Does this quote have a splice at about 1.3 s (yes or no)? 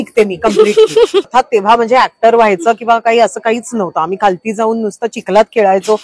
yes